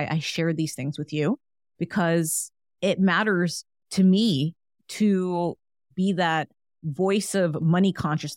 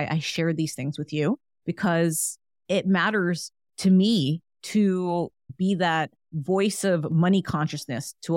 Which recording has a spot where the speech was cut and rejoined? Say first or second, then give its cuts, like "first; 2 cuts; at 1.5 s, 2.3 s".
second; 4 cuts; at 1.5 s, 4.5 s, 5.4 s, 6.2 s